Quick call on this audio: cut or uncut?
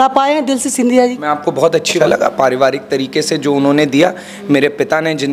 cut